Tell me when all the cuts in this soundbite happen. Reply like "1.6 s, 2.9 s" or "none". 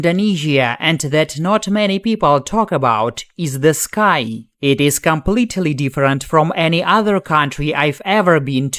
none